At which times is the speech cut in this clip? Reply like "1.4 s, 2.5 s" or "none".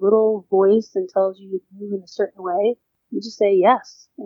2.9 s